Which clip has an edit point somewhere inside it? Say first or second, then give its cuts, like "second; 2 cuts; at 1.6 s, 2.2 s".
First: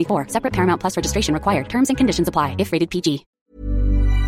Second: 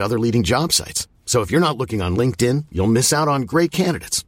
first; 1 cut; at 3.3 s